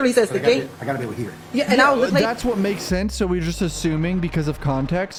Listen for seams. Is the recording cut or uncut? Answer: uncut